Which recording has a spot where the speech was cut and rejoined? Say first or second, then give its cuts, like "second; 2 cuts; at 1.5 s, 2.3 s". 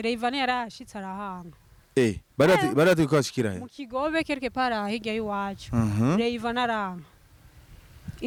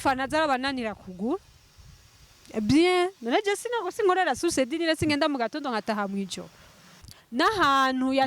second; 1 cut; at 7.2 s